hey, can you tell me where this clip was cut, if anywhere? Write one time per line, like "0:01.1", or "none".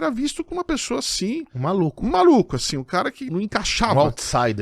0:03.3

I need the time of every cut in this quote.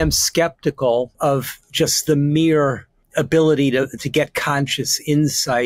0:01.1
0:03.0

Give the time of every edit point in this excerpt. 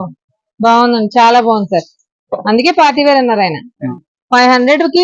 0:03.9

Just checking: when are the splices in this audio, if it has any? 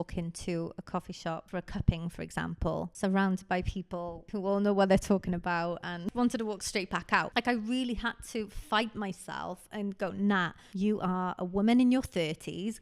0:01.4
0:02.9
0:04.2
0:06.0
0:07.3
0:10.6

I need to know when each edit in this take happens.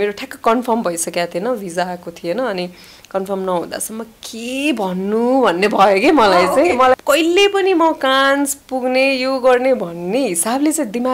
0:07.0

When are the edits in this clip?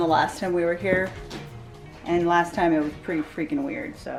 none

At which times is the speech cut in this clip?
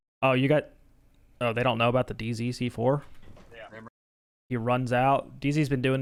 none

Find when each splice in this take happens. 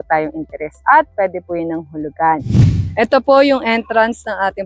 0:02.4

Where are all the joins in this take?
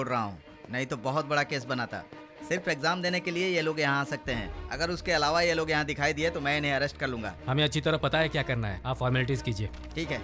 none

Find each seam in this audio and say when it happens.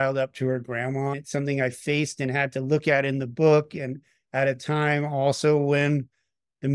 0:01.2

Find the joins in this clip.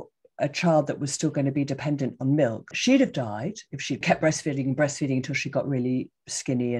0:02.7
0:04.0

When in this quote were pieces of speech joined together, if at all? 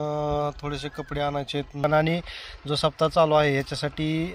0:01.8

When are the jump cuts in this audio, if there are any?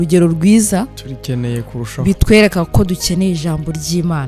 none

